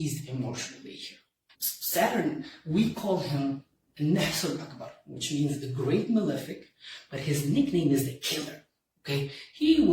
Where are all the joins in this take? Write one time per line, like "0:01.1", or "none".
0:01.6